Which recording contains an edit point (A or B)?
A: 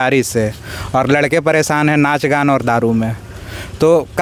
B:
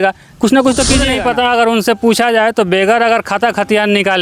B